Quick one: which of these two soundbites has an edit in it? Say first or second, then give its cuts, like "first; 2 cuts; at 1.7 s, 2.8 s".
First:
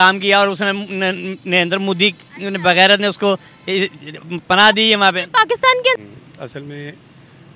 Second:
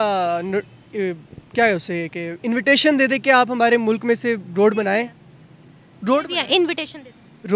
first; 1 cut; at 6.0 s